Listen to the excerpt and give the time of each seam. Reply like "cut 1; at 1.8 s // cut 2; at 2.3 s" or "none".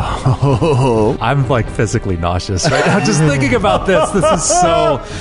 cut 1; at 1.2 s